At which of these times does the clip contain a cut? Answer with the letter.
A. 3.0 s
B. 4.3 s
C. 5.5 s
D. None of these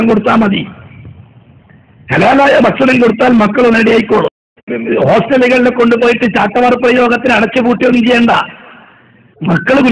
B